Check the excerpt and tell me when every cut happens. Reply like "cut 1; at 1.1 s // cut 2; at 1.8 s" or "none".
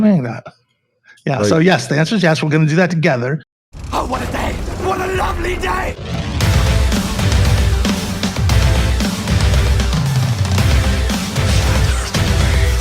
cut 1; at 3.5 s